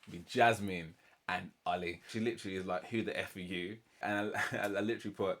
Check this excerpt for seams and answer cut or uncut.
cut